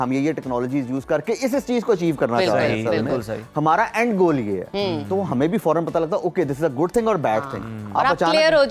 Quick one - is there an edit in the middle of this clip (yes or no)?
no